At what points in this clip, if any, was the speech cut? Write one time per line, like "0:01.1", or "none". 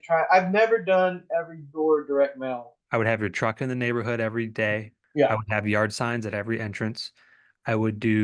0:02.8
0:05.0